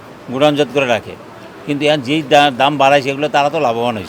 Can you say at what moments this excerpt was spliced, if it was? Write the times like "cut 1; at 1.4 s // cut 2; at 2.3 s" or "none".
none